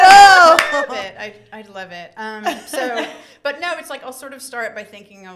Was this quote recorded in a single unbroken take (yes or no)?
no